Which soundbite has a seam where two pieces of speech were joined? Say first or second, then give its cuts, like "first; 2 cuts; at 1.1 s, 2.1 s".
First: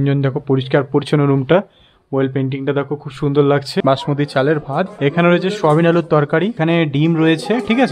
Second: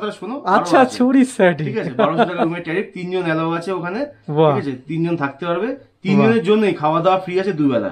first; 3 cuts; at 3.8 s, 4.9 s, 6.6 s